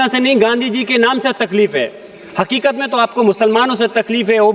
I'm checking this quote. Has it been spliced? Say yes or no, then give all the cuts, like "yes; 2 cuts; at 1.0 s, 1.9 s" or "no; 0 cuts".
no; 0 cuts